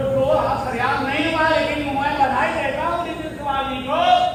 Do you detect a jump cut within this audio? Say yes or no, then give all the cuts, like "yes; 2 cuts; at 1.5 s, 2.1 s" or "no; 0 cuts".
no; 0 cuts